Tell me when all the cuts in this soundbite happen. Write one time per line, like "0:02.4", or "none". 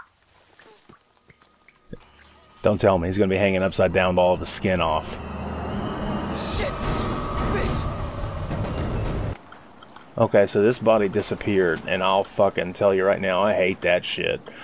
0:09.3